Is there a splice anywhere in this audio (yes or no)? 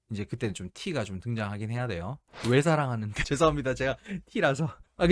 yes